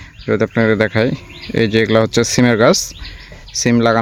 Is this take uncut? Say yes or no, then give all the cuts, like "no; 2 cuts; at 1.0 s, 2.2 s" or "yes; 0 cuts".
yes; 0 cuts